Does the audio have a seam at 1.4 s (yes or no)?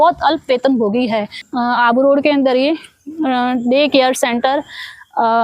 yes